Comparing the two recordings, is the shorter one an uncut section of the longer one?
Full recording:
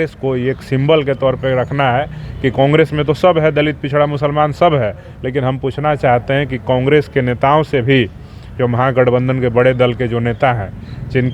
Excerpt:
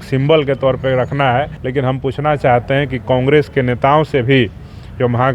no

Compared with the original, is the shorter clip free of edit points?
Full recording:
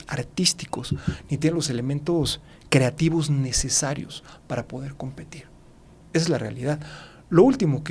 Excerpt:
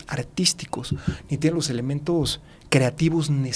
yes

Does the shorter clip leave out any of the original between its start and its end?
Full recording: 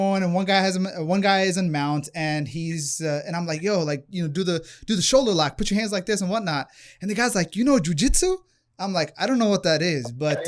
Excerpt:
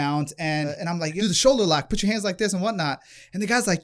yes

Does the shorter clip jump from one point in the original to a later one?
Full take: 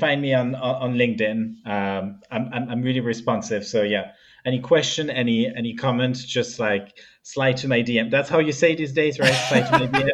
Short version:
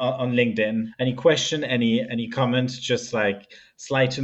yes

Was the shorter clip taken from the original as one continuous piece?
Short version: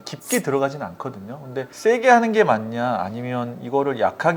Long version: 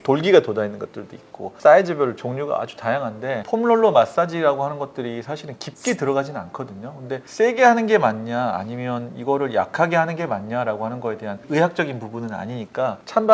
yes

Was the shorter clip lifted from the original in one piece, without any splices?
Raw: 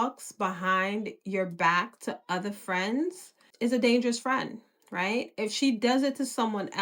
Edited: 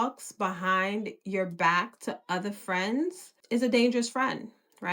no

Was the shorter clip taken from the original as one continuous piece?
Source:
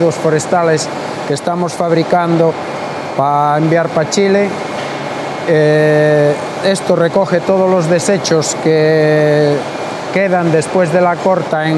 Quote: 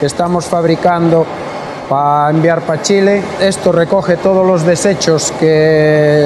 no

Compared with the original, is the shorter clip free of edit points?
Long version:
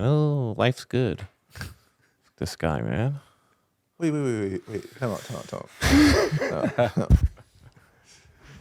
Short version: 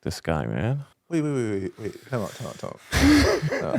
no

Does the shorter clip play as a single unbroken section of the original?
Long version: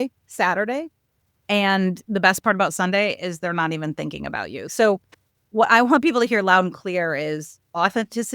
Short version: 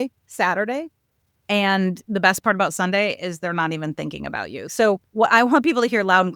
no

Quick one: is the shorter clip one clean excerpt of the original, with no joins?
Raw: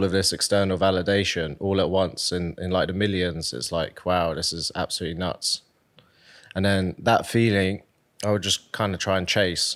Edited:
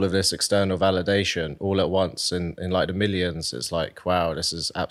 yes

